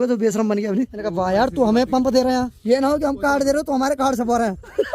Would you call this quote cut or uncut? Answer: cut